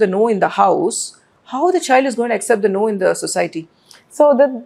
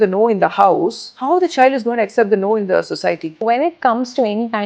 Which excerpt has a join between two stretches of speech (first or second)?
second